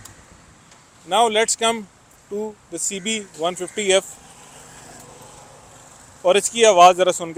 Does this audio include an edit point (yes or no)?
no